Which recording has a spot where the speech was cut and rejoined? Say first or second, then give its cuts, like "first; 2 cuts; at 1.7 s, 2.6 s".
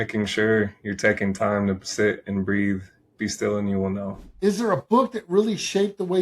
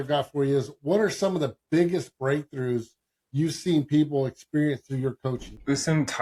first; 1 cut; at 4.3 s